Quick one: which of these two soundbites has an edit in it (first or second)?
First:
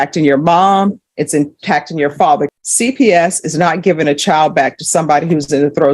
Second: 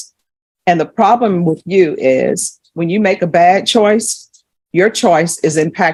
first